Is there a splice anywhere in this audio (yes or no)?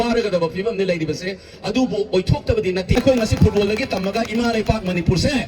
yes